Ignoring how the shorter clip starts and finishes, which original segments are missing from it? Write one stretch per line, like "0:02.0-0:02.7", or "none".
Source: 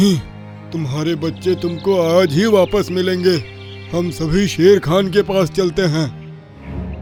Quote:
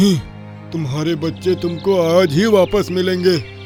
none